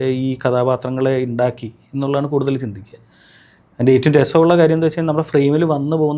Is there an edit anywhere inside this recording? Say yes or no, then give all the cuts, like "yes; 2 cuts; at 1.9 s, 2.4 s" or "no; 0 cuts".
no; 0 cuts